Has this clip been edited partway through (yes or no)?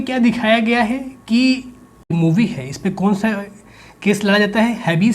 yes